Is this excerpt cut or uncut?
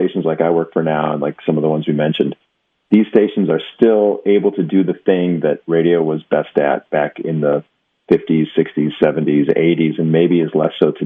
uncut